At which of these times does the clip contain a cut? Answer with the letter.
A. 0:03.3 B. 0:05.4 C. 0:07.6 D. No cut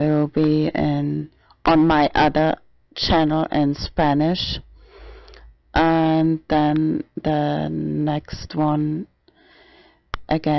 C